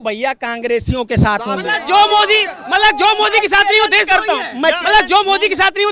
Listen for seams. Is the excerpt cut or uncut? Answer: uncut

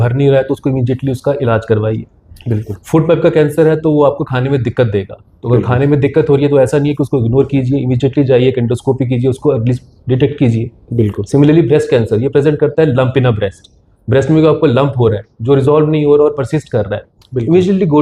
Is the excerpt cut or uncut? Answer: uncut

